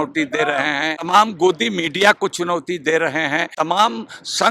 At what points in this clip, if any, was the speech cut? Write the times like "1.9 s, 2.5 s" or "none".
1.0 s, 3.5 s